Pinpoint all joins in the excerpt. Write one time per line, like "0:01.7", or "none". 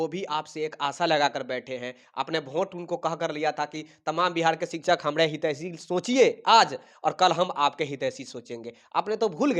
none